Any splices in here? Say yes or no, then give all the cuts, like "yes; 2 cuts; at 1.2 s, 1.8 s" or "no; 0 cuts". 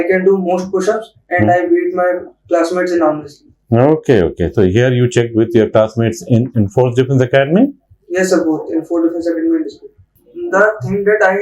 yes; 1 cut; at 10.0 s